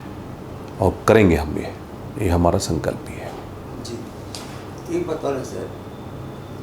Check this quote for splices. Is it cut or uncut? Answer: uncut